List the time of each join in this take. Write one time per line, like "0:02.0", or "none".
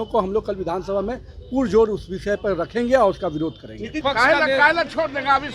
0:03.9